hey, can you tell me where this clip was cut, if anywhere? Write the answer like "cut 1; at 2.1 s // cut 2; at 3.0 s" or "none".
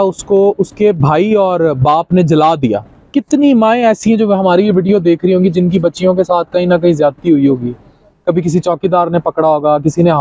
cut 1; at 2.9 s